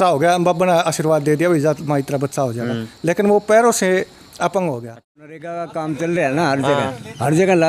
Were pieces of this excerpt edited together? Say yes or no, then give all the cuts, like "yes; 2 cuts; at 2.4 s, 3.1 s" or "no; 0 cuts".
yes; 1 cut; at 5.4 s